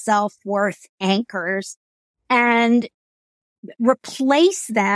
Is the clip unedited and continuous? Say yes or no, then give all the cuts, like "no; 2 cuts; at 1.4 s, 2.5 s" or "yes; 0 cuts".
yes; 0 cuts